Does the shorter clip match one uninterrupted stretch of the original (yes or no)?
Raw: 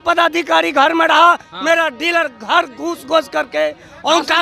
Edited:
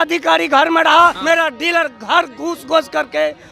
no